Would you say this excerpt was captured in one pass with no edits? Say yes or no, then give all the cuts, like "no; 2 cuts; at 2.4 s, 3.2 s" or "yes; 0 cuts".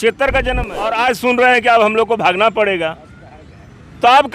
no; 1 cut; at 0.9 s